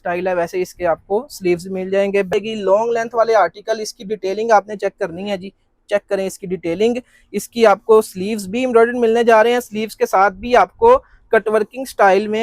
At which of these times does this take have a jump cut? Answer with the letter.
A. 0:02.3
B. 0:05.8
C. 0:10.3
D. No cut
A